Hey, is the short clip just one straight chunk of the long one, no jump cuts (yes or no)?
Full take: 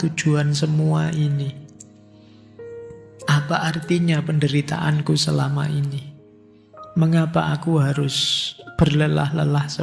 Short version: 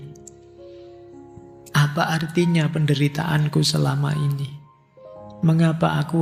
yes